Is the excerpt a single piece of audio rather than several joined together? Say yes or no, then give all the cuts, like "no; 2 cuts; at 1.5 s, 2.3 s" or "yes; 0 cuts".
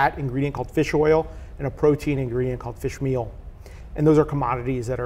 yes; 0 cuts